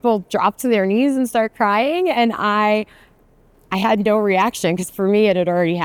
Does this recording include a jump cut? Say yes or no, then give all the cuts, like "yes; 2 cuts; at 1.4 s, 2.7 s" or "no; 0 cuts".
no; 0 cuts